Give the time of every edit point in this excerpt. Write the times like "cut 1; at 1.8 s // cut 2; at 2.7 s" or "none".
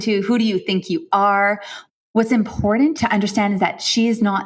cut 1; at 1.7 s // cut 2; at 3.0 s